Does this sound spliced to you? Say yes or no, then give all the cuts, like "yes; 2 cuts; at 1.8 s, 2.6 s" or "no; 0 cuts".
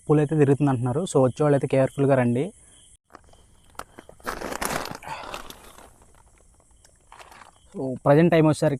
yes; 1 cut; at 3.0 s